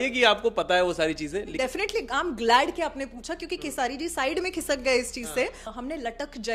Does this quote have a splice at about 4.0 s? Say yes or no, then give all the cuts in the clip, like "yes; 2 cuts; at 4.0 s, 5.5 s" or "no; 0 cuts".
no; 2 cuts; at 1.5 s, 5.7 s